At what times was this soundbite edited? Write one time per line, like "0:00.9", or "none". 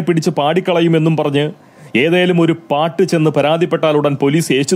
none